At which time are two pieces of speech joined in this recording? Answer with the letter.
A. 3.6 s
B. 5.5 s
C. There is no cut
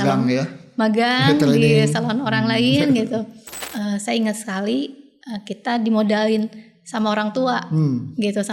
A